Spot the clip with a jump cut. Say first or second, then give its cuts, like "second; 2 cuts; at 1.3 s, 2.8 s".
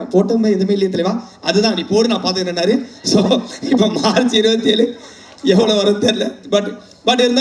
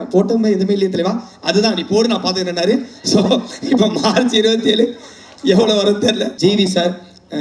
second; 1 cut; at 6.3 s